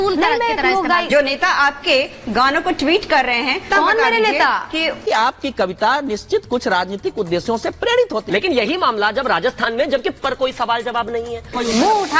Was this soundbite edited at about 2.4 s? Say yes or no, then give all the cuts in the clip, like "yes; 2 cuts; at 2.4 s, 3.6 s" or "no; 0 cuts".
no; 3 cuts; at 1.1 s, 3.7 s, 5.0 s